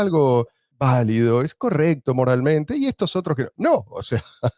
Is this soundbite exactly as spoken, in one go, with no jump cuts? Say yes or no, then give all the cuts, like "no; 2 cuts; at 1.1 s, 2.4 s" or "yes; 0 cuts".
yes; 0 cuts